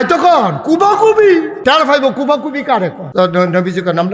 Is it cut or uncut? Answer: cut